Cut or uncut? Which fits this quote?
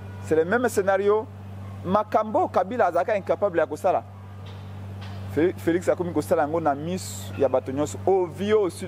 uncut